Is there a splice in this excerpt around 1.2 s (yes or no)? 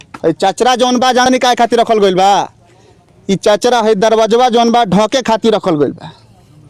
yes